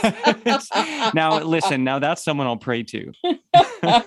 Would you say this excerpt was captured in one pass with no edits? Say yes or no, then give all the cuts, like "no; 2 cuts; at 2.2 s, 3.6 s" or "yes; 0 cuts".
no; 1 cut; at 3.0 s